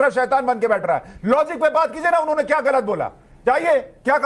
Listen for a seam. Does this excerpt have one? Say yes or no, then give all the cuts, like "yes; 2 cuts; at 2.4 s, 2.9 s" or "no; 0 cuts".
yes; 1 cut; at 3.3 s